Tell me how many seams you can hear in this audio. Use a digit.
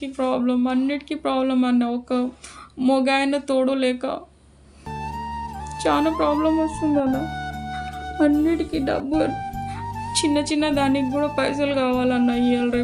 0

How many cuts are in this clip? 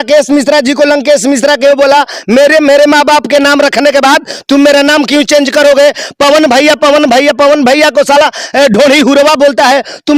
0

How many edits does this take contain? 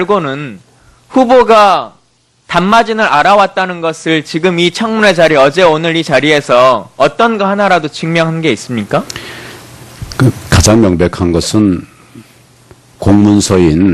1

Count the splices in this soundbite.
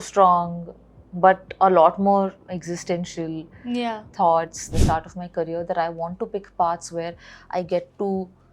1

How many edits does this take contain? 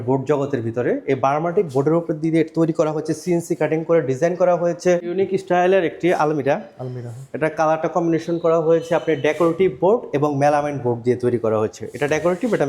1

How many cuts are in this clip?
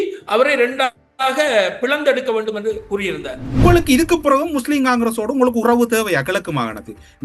1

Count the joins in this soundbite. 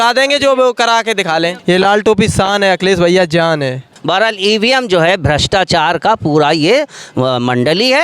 2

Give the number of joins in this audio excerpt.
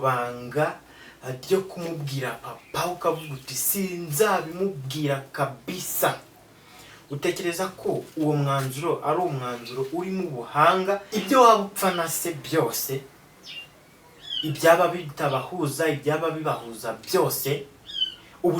1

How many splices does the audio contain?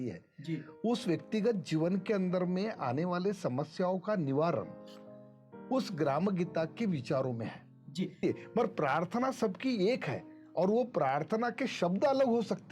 1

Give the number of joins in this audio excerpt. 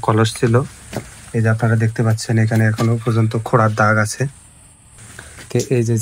1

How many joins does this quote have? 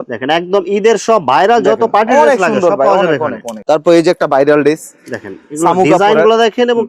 0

